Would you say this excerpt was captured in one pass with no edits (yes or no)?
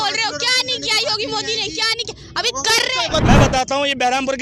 no